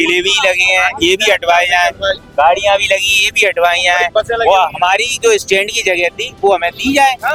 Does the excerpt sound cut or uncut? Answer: uncut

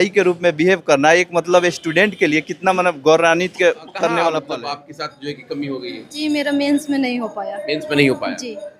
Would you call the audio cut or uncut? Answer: cut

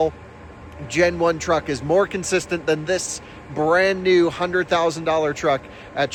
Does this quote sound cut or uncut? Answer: uncut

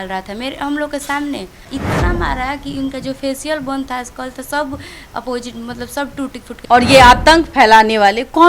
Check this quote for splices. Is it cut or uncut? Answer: cut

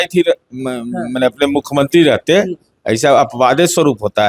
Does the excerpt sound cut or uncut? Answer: uncut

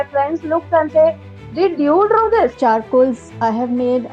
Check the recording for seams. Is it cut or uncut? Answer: cut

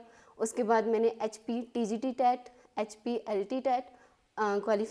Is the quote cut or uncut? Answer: uncut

